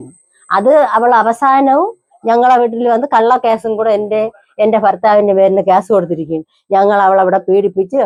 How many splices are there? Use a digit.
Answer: 0